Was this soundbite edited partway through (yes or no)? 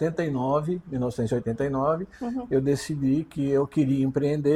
no